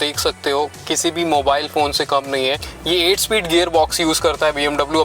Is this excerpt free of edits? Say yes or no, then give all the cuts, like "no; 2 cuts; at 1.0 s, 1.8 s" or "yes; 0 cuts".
no; 1 cut; at 2.7 s